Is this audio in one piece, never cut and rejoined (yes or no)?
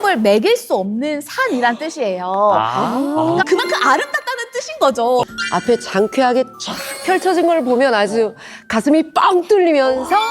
no